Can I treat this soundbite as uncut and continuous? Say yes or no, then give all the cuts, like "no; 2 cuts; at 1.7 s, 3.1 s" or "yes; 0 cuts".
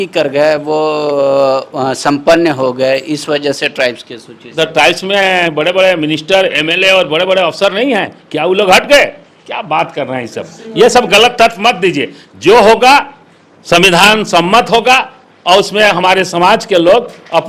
yes; 0 cuts